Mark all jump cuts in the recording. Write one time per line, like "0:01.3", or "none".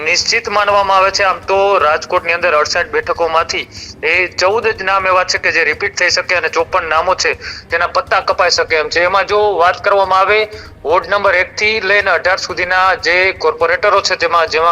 none